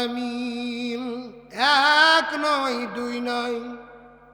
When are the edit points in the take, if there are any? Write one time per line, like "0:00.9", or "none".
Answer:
0:01.4